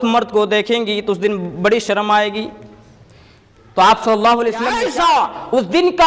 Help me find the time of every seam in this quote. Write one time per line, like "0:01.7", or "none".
0:04.8